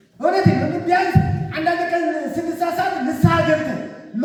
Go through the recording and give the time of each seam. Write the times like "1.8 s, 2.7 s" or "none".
none